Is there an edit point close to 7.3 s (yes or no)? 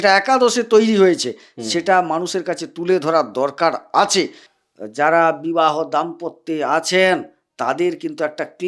no